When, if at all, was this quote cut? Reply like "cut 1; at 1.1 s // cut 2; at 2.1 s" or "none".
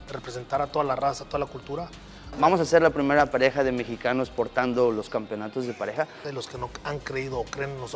cut 1; at 2.5 s // cut 2; at 6.2 s